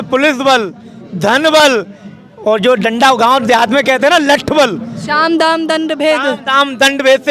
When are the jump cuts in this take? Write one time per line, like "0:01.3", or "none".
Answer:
none